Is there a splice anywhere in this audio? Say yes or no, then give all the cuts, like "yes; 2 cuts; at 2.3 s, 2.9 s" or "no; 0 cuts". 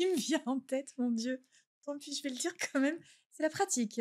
no; 0 cuts